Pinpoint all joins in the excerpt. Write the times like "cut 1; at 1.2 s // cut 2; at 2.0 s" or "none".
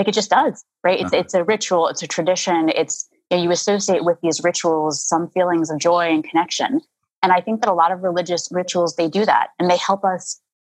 none

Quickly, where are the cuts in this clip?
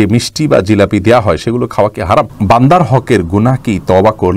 cut 1; at 2.3 s

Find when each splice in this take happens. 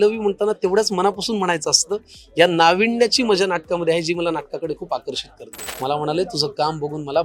cut 1; at 5.6 s

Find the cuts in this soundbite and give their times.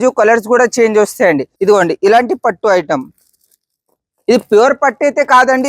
cut 1; at 1.5 s

